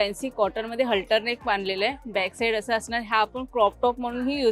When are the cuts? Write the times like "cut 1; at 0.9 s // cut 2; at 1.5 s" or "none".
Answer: none